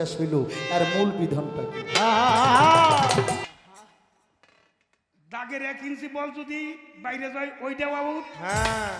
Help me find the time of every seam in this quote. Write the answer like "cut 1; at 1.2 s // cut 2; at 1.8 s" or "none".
cut 1; at 3.4 s